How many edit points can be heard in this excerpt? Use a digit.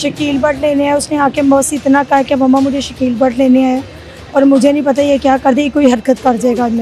0